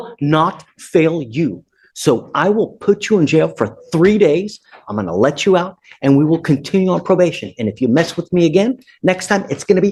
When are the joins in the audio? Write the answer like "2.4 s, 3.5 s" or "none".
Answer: none